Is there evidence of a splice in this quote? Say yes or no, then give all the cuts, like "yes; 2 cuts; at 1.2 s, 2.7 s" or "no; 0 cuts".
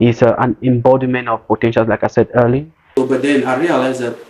yes; 1 cut; at 3.0 s